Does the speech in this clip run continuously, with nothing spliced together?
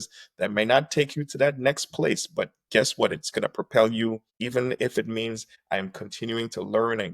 no; 1 cut; at 4.3 s

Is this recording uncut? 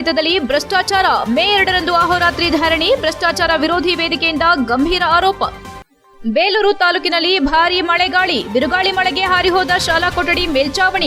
yes; 0 cuts

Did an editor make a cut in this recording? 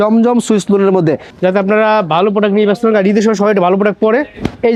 no; 0 cuts

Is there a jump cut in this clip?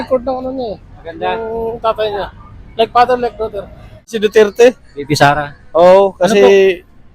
yes; 1 cut; at 4.1 s

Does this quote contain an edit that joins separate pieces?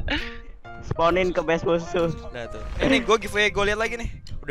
yes; 1 cut; at 2.6 s

